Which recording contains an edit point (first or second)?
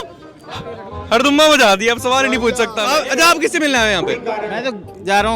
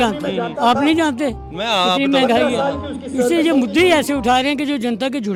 first